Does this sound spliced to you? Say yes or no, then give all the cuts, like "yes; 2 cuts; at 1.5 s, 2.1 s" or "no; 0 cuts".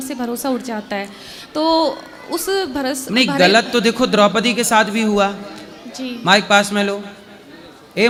no; 0 cuts